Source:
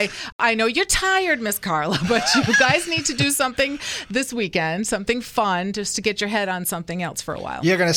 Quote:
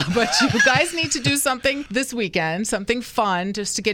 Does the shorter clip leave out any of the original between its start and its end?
yes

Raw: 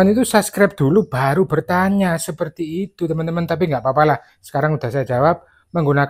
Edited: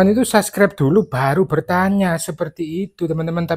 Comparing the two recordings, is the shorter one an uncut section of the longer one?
yes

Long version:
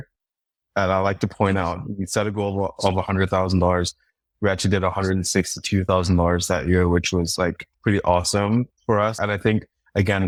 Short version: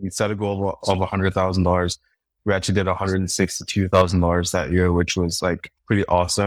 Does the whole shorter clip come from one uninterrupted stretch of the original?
yes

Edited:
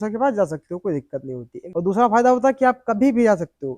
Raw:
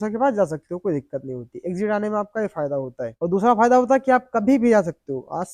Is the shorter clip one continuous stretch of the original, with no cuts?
no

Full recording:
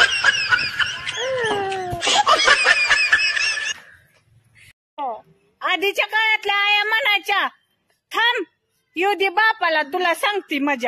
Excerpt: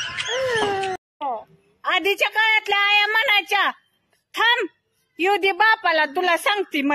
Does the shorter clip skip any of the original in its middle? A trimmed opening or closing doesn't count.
yes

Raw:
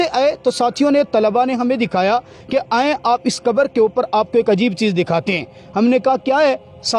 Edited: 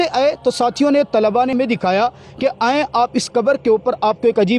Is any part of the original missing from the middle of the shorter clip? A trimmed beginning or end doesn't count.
yes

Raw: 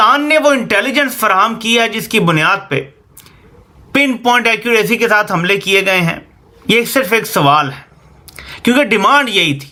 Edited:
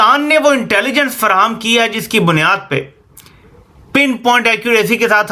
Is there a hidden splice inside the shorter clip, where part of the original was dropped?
no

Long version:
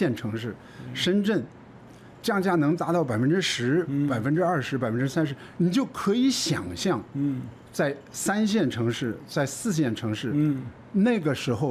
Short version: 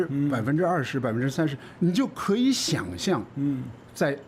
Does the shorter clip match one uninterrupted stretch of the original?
yes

